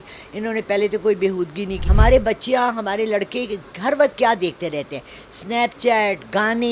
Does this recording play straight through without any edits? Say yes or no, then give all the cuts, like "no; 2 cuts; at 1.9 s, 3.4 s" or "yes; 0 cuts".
no; 1 cut; at 1.8 s